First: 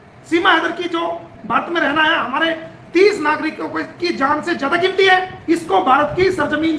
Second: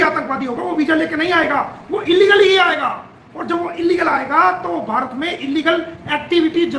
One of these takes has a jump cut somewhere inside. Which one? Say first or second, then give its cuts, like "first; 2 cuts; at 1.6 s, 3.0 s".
first; 1 cut; at 5.3 s